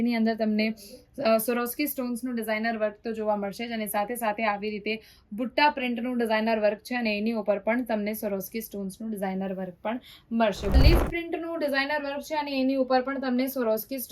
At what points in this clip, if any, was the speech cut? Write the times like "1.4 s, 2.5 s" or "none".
10.8 s